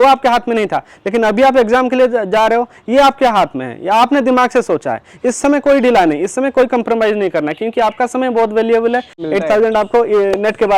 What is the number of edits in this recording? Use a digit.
1